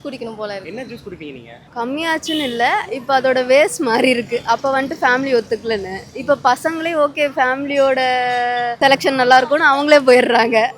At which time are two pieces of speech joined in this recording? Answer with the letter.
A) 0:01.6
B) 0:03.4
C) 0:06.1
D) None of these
A